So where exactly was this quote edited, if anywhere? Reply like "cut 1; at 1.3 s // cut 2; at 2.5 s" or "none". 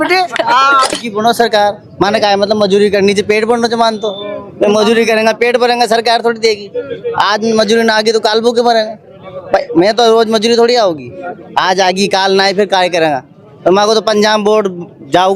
cut 1; at 0.9 s